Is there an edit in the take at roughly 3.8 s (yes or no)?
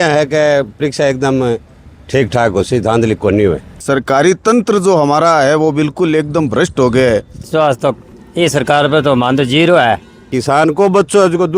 yes